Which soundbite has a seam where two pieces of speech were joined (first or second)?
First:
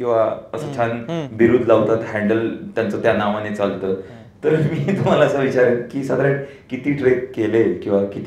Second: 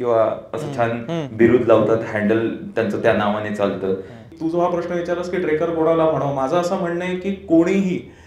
second